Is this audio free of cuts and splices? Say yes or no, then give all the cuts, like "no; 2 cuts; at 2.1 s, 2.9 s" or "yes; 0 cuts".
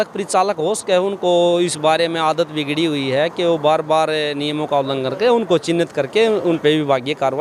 yes; 0 cuts